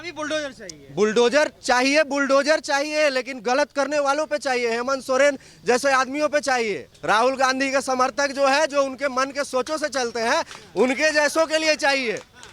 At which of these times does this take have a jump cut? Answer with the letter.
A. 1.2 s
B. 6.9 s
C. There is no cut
B